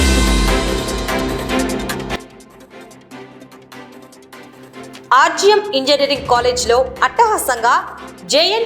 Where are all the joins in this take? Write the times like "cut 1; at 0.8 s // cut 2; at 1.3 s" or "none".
cut 1; at 2.1 s // cut 2; at 4.0 s // cut 3; at 4.9 s